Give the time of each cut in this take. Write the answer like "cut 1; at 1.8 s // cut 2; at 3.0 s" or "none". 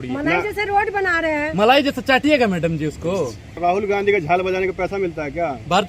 cut 1; at 3.6 s